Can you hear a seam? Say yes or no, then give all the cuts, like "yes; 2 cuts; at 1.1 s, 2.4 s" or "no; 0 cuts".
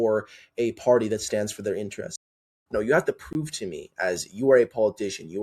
yes; 1 cut; at 2.2 s